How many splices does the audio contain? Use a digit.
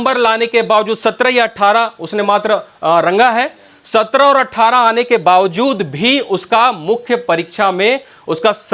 0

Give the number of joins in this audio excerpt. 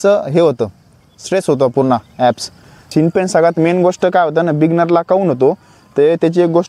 1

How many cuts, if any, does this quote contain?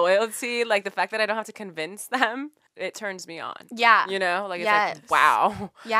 1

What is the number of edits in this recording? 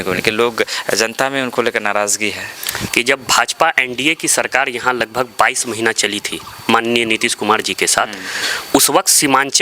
1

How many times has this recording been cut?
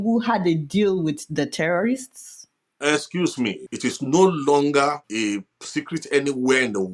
2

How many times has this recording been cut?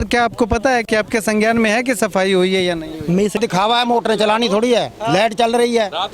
1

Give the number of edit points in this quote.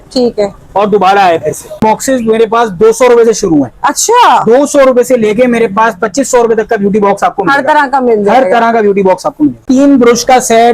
2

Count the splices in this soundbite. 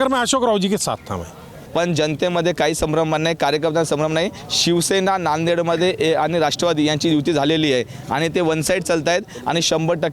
1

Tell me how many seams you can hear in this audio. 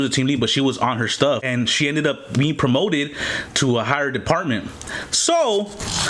1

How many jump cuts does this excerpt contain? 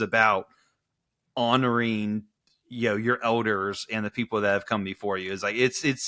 0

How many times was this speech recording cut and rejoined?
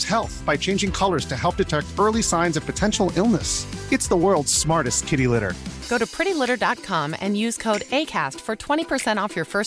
0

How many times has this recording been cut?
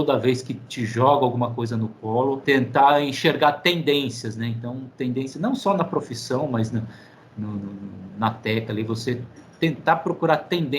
1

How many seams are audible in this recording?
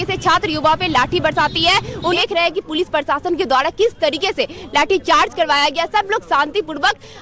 1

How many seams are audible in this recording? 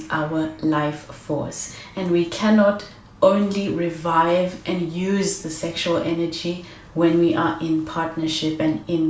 0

